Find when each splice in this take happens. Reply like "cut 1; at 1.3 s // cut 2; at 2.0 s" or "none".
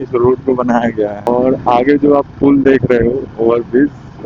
cut 1; at 1.3 s